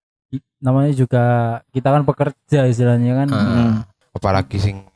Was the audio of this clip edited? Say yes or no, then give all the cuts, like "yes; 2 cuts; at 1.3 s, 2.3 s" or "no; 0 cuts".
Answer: yes; 1 cut; at 4.0 s